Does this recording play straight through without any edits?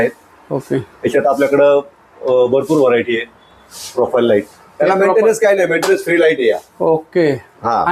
yes; 0 cuts

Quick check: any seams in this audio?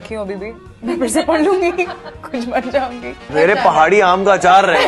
yes; 1 cut; at 3.3 s

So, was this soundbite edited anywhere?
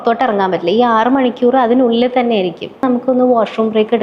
yes; 1 cut; at 2.8 s

